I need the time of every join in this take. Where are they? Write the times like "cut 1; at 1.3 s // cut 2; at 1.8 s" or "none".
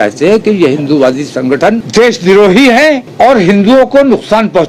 cut 1; at 1.8 s // cut 2; at 3.1 s